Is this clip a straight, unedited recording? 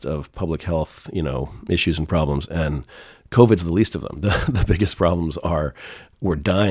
yes; 0 cuts

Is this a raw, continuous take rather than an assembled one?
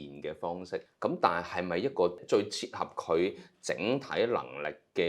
no; 2 cuts; at 0.9 s, 2.2 s

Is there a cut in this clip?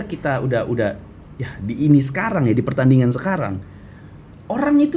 no; 0 cuts

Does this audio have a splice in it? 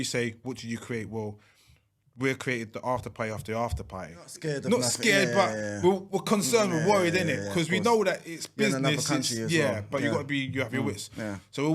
yes; 1 cut; at 4.4 s

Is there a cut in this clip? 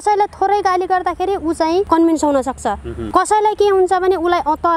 yes; 2 cuts; at 1.9 s, 2.9 s

